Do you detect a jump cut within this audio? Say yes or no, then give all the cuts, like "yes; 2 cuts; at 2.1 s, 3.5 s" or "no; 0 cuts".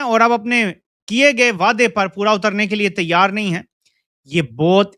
no; 0 cuts